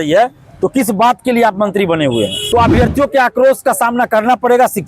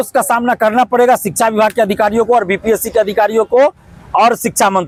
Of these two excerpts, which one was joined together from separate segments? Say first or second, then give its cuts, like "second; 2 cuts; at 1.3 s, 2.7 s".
first; 1 cut; at 2.4 s